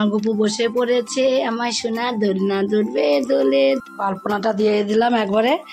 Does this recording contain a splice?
yes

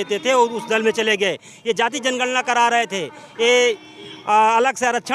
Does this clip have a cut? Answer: no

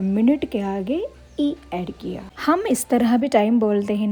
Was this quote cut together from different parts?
no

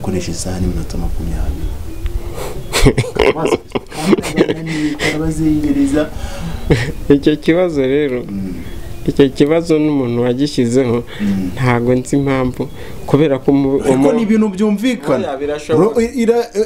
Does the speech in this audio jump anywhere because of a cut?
no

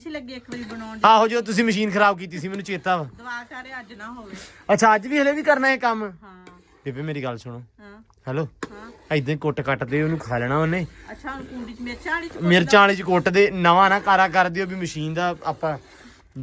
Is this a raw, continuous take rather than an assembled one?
yes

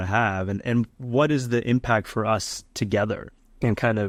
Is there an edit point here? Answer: no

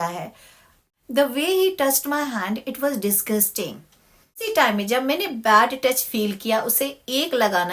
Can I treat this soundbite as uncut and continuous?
no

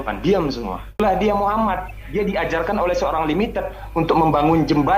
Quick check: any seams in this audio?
yes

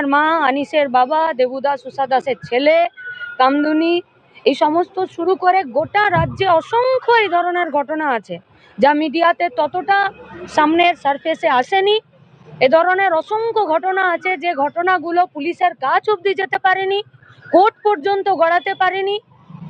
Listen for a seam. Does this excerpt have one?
no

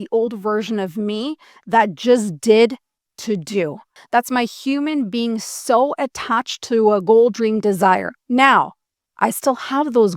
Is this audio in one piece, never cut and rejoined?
no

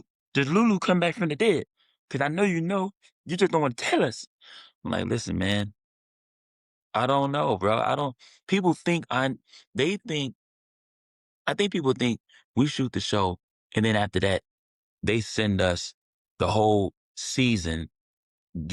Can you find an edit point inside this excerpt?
no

